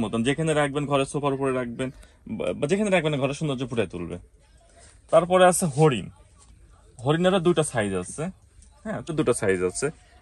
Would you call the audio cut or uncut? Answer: cut